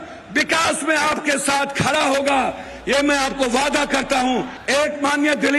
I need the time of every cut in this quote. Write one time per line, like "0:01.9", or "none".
0:04.6